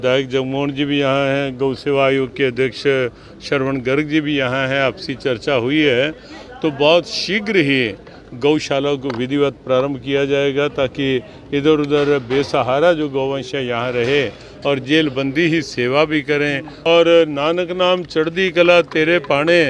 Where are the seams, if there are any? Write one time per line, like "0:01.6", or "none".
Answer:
0:16.7

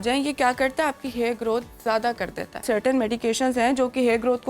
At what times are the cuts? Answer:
0:02.6

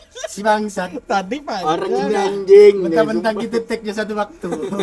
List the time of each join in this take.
none

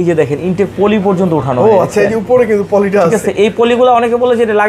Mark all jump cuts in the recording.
none

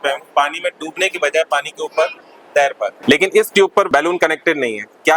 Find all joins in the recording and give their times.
0:03.0
0:03.9

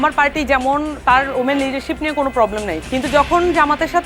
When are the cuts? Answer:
none

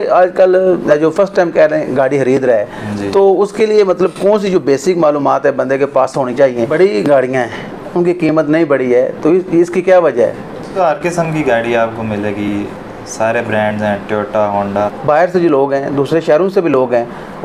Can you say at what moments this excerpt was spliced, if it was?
0:01.1
0:06.6
0:10.7
0:14.7

